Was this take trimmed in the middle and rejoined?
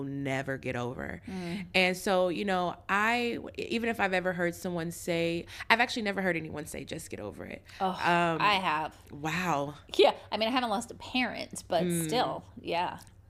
no; 0 cuts

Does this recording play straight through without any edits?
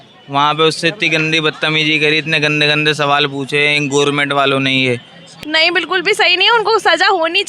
no; 1 cut; at 5.3 s

